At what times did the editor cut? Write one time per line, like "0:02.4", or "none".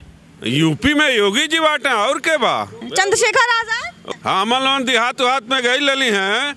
0:02.8
0:03.9